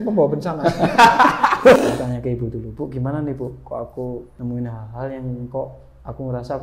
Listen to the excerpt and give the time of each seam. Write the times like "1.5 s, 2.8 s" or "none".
1.8 s, 4.3 s